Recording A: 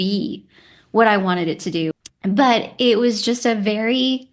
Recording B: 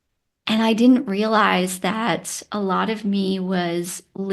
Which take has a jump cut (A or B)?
A